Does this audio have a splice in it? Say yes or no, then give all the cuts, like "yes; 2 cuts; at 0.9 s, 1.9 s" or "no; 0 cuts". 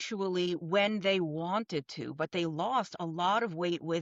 no; 0 cuts